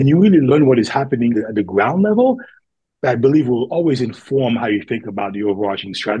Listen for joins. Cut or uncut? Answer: cut